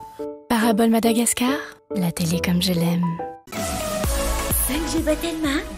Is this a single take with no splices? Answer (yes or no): no